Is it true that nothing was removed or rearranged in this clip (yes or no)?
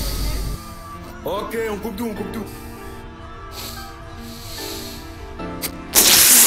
yes